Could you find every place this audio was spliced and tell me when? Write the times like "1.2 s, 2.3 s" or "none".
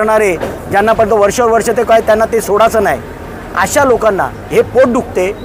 none